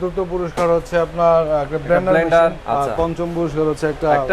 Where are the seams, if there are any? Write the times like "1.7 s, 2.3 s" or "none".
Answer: 2.6 s